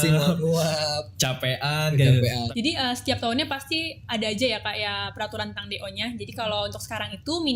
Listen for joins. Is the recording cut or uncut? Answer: cut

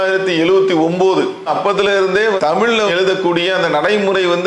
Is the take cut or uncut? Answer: uncut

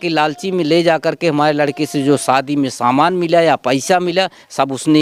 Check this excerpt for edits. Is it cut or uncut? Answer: uncut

